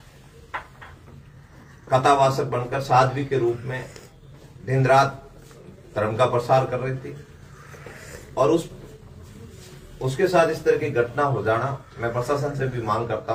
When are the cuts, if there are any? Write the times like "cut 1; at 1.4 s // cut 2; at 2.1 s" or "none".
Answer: none